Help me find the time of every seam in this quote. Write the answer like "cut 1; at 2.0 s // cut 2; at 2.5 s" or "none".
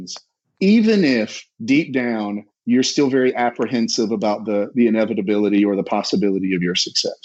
none